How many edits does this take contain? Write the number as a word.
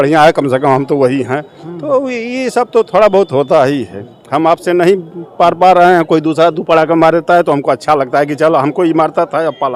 zero